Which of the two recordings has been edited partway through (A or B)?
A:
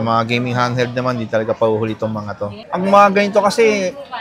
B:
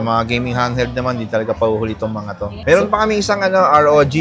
A